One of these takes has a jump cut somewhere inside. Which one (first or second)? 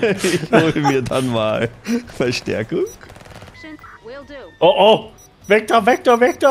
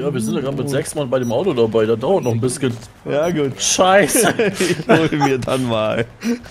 first